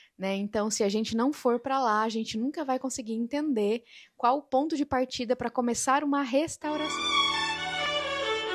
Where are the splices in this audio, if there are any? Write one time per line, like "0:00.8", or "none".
0:06.8